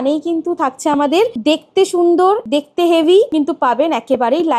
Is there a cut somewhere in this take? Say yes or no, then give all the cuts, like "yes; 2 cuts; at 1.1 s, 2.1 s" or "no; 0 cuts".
yes; 3 cuts; at 1.4 s, 2.4 s, 3.3 s